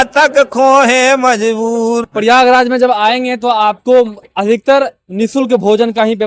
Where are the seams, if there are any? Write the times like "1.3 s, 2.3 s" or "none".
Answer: 2.1 s